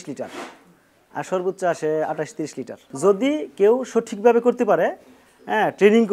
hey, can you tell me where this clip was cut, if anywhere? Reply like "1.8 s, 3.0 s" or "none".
2.8 s